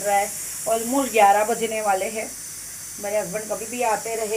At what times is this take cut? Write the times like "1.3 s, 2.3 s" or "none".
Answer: none